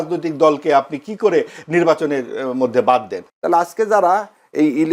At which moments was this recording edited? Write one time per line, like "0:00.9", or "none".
0:03.2